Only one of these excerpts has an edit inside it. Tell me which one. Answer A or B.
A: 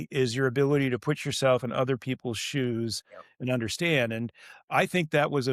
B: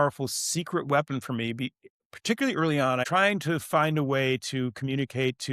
B